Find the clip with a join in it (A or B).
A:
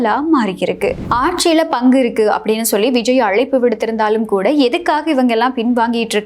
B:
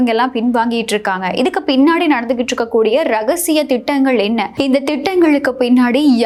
A